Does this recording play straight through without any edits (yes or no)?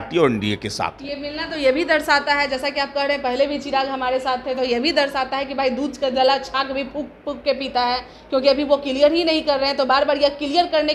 yes